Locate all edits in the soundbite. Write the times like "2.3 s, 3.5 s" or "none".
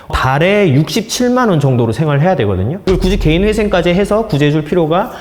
2.8 s